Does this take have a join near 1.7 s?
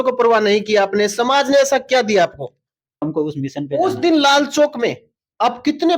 no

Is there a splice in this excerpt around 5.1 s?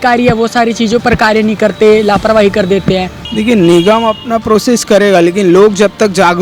no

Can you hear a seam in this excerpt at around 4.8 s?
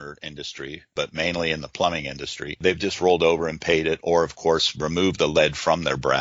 no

